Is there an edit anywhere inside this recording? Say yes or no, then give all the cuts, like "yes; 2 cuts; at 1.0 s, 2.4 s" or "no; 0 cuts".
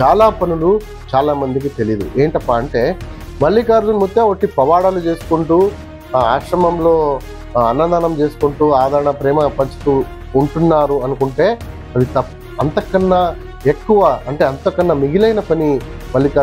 no; 0 cuts